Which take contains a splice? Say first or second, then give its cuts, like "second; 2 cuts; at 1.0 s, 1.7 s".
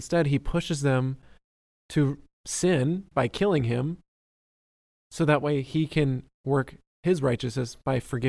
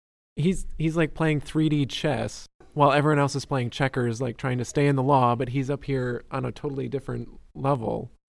second; 1 cut; at 2.6 s